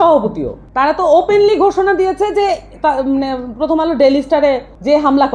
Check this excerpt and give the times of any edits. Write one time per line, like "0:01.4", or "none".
none